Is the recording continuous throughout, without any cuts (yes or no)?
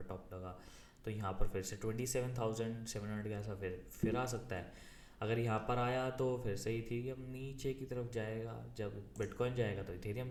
yes